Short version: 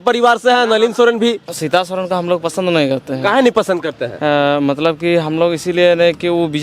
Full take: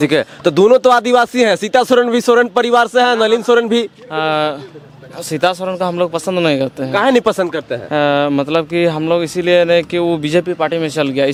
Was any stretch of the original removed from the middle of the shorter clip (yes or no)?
yes